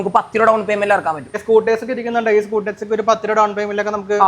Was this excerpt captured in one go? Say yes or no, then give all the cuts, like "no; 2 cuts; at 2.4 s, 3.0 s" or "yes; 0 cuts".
no; 1 cut; at 1.3 s